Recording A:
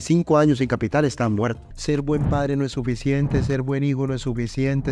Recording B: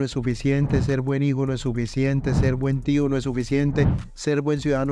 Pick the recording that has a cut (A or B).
A